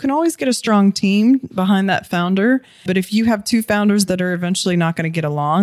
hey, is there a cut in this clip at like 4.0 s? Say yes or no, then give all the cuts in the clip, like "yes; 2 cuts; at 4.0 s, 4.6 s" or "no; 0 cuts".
no; 1 cut; at 2.8 s